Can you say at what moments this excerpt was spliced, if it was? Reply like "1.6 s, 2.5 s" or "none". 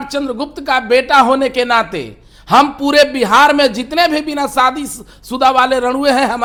none